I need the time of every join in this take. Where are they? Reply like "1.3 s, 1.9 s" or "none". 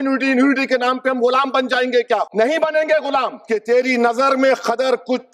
2.3 s, 3.4 s